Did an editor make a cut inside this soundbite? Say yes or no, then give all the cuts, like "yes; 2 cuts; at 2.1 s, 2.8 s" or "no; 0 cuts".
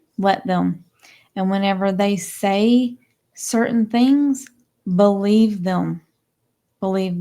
no; 0 cuts